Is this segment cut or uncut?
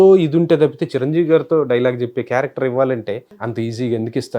cut